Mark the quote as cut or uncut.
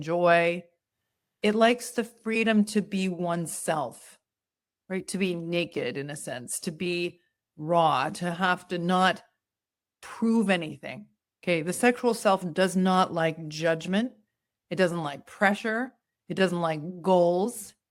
uncut